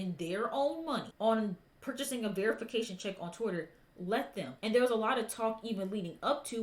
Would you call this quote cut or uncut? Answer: cut